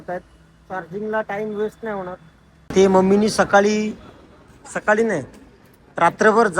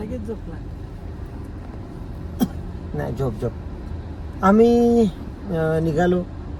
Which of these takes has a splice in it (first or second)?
first